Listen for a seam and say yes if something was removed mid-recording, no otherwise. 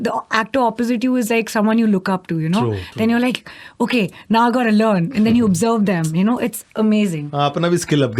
no